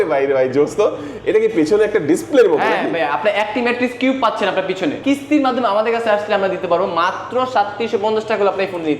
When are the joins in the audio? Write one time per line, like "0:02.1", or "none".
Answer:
0:05.0